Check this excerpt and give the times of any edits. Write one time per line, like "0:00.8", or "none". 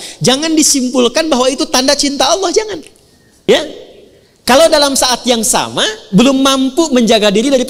0:03.5